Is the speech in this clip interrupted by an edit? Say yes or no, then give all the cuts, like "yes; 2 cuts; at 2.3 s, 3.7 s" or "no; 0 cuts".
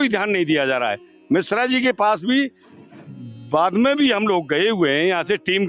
no; 0 cuts